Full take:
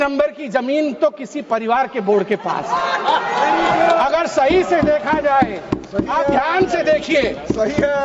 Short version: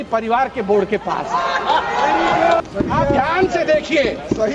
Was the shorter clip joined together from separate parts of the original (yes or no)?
yes